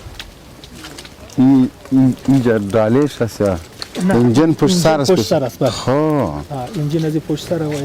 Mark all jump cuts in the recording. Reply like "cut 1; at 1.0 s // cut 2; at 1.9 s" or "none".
none